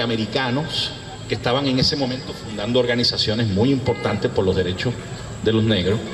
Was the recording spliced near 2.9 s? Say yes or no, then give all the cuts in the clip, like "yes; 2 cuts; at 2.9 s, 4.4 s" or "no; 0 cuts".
yes; 1 cut; at 2.9 s